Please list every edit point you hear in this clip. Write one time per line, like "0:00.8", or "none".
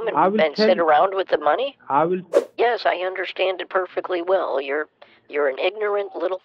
0:02.4